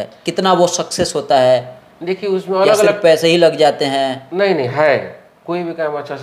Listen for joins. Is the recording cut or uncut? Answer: uncut